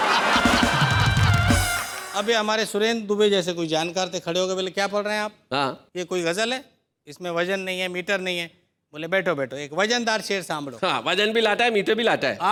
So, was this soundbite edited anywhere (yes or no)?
no